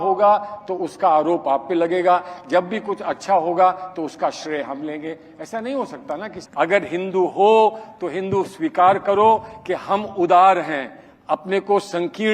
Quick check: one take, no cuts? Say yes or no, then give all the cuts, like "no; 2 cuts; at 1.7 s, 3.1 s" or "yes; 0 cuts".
no; 1 cut; at 6.3 s